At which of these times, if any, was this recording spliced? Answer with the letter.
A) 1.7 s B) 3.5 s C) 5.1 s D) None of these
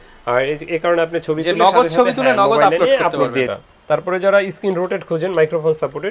B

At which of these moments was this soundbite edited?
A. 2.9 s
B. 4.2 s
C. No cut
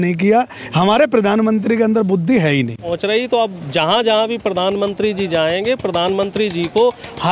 A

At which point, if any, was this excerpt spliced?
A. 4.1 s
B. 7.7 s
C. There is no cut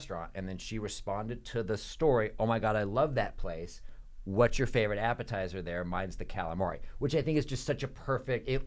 C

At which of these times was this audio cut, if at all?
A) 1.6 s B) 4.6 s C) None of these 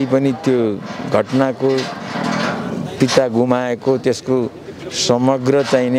C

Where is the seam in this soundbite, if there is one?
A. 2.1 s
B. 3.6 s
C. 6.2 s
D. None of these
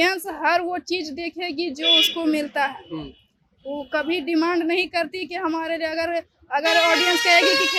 D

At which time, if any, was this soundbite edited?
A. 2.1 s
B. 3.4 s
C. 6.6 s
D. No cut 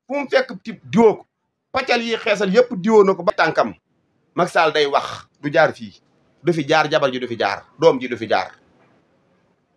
B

